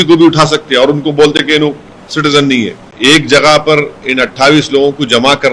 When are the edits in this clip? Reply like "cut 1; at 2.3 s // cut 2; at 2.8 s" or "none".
cut 1; at 2.9 s